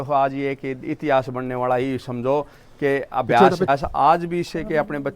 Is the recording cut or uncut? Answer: cut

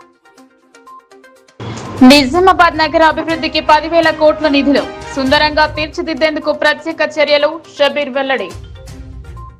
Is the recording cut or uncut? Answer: uncut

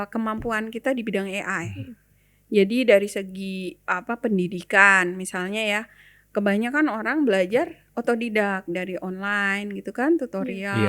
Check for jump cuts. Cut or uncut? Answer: uncut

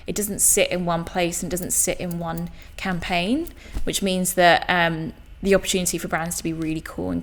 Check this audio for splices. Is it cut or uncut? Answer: uncut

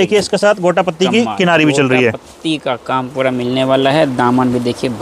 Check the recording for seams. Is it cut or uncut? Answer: uncut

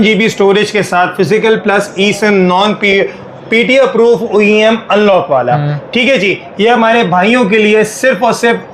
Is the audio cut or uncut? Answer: uncut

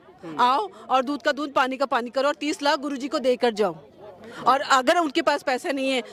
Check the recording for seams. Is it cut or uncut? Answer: uncut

